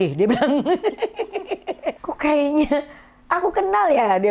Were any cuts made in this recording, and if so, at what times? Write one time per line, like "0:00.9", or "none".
0:02.0